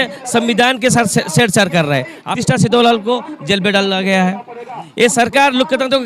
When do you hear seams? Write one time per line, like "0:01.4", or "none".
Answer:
0:02.2